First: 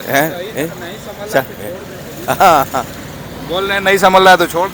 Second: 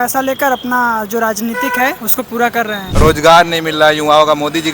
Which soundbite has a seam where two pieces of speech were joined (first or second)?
second